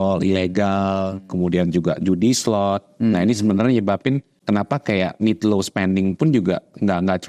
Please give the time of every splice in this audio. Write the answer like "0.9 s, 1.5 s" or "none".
4.3 s